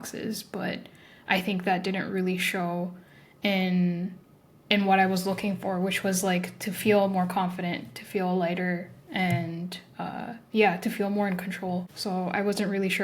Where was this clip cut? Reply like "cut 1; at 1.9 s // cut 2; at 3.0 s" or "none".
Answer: cut 1; at 11.9 s